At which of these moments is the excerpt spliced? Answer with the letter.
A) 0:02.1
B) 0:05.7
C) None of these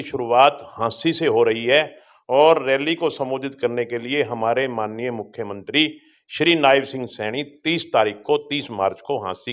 C